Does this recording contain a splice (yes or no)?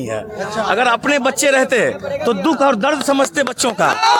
no